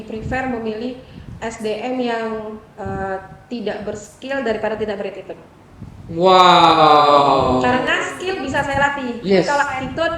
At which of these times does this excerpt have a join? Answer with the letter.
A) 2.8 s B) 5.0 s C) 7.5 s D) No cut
D